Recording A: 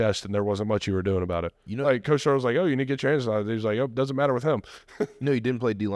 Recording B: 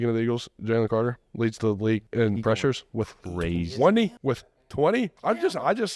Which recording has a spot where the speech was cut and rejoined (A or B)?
B